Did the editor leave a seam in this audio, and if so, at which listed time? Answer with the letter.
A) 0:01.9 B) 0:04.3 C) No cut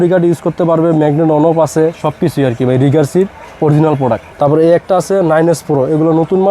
B